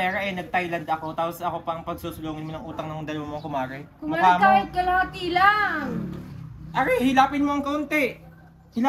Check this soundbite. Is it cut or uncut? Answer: uncut